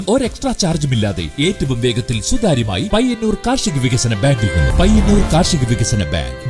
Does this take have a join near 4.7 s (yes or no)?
yes